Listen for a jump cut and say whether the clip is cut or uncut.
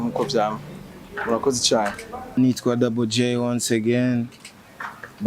cut